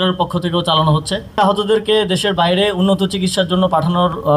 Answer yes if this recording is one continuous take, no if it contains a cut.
no